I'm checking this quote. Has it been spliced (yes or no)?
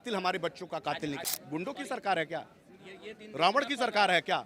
yes